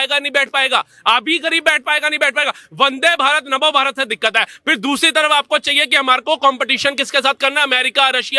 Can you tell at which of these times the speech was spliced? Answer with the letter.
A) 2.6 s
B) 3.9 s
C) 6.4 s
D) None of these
D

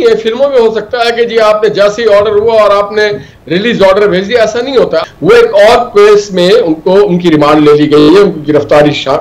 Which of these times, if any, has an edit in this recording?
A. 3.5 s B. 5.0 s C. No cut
B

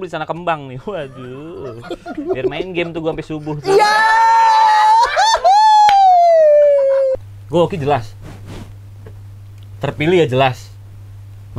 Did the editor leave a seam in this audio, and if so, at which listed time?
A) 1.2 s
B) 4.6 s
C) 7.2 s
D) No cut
C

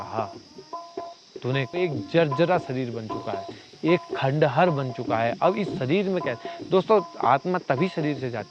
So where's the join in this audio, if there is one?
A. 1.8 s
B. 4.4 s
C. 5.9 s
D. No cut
A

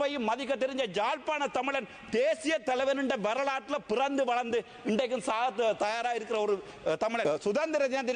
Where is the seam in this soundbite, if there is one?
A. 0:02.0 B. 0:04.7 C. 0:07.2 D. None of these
C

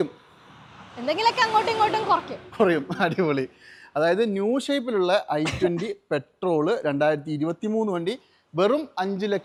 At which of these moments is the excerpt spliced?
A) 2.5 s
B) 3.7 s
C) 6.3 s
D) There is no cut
D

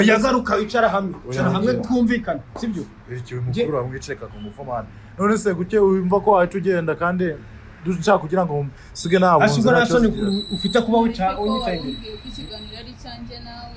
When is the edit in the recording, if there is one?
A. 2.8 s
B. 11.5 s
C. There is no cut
C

